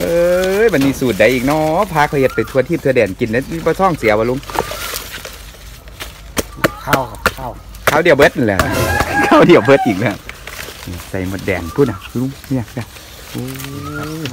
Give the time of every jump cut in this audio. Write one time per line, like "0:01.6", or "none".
none